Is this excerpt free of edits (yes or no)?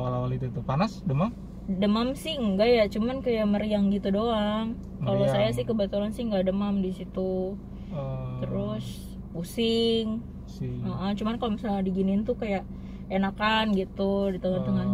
yes